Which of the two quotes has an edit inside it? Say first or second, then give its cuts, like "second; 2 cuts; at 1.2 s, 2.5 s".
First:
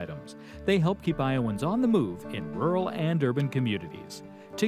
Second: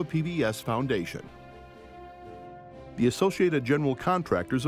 second; 2 cuts; at 1.3 s, 3.0 s